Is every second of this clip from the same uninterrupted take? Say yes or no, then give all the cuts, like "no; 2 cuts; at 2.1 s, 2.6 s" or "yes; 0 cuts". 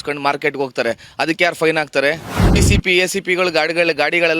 no; 1 cut; at 2.6 s